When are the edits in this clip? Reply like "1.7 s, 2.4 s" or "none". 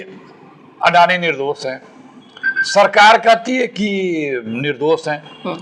none